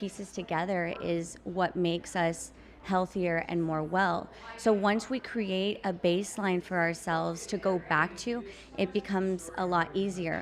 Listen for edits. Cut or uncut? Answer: uncut